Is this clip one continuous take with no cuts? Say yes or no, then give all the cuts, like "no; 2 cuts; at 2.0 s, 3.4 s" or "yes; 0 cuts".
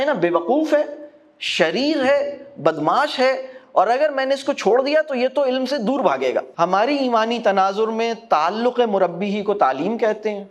no; 1 cut; at 6.4 s